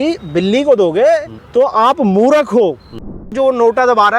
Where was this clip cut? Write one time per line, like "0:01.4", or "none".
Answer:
0:01.4
0:03.3